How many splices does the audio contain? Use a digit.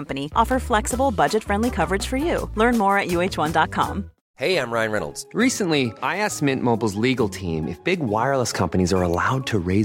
1